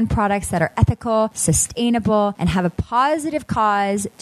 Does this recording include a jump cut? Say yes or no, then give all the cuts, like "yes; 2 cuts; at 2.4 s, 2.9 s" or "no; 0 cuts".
yes; 2 cuts; at 1.4 s, 2.4 s